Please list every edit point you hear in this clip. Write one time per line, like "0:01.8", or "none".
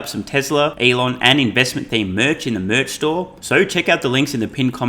0:00.8
0:03.4